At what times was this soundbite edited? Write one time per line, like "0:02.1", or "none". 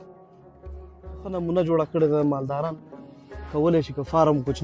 0:01.4